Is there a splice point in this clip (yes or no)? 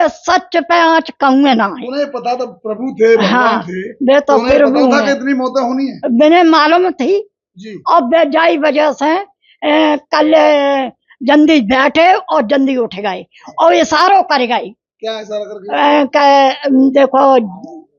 no